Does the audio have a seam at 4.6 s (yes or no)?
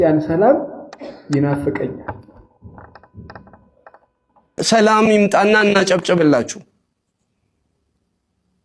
yes